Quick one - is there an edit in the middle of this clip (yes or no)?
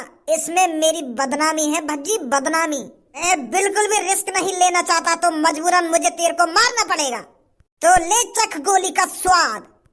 yes